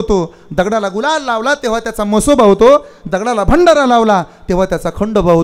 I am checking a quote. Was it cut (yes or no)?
no